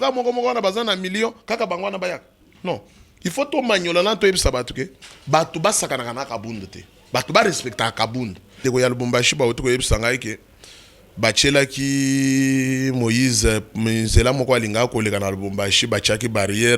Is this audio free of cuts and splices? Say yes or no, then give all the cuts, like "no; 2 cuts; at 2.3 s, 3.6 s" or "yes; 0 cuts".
no; 1 cut; at 8.6 s